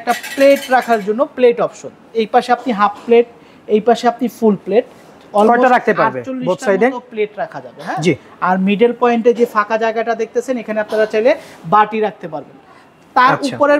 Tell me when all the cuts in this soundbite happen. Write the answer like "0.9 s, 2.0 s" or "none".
none